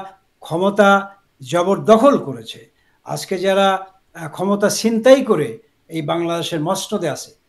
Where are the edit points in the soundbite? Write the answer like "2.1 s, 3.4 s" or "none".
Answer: none

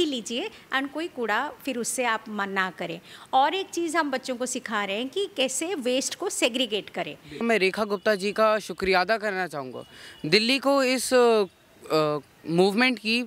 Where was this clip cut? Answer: 7.4 s

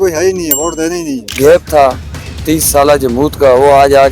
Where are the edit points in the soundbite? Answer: 1.2 s

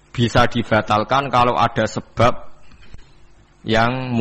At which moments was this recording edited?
none

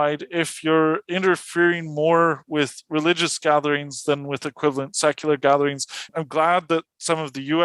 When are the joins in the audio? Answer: 6.0 s

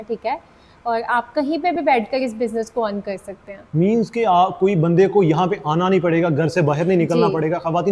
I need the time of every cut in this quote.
none

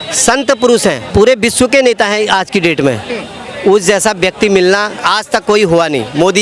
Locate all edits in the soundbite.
1.0 s, 5.0 s

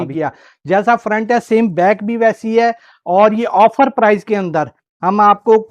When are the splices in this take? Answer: 0.9 s

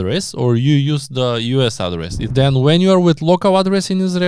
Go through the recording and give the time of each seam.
2.2 s

